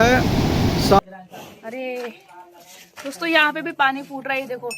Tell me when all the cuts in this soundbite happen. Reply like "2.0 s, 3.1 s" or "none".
1.0 s